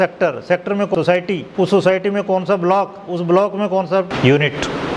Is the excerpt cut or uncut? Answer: cut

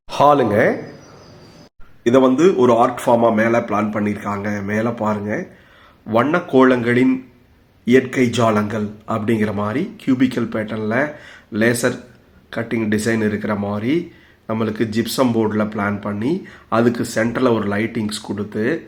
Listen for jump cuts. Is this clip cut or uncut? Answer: uncut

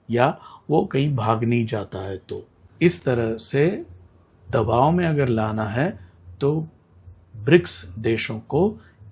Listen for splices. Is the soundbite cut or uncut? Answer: cut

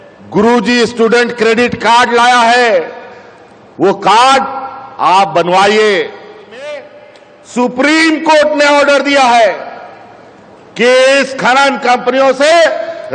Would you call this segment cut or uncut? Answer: cut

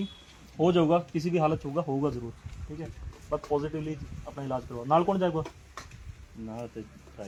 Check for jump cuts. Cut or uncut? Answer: uncut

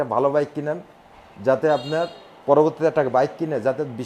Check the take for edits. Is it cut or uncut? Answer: uncut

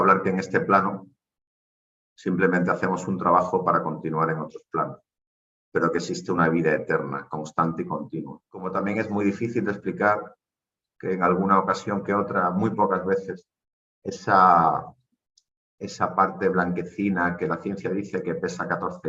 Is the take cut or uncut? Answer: cut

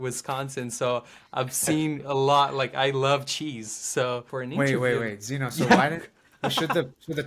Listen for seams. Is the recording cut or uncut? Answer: cut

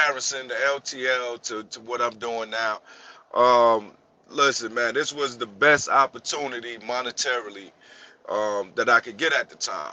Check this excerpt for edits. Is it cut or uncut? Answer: uncut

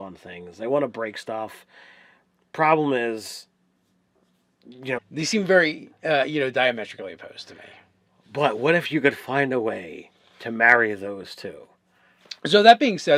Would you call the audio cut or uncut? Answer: uncut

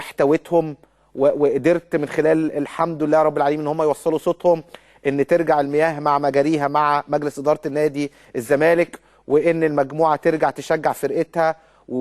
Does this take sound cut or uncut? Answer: cut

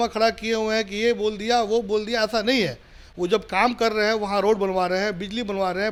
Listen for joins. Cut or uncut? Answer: uncut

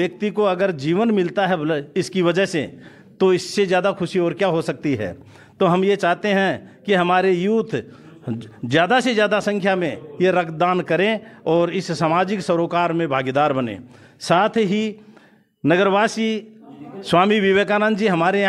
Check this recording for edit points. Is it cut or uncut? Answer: uncut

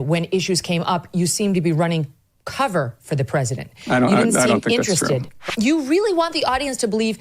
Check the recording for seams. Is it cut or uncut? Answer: cut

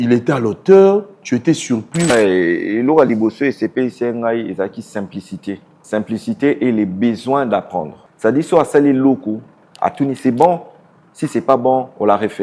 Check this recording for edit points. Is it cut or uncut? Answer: cut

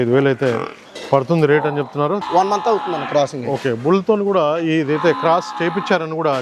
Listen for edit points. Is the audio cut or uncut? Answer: cut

